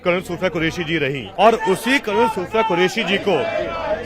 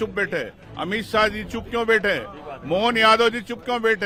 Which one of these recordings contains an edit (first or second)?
first